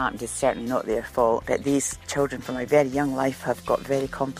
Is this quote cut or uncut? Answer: cut